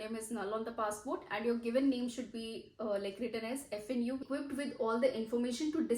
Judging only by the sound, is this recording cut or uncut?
cut